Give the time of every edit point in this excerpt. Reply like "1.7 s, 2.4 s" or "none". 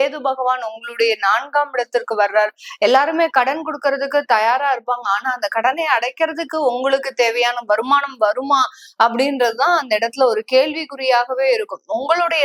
none